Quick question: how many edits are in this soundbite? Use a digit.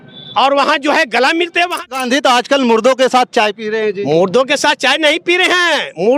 1